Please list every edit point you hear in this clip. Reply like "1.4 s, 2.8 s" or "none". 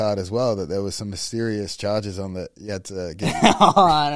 none